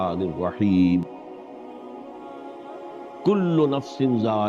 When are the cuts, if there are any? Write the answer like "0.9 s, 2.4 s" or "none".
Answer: 1.6 s, 3.2 s